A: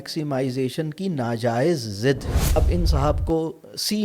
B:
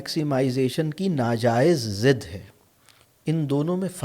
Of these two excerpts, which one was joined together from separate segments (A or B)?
A